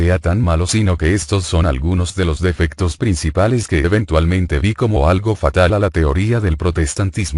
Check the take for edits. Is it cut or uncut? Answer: cut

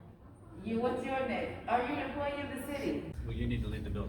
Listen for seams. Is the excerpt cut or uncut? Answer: cut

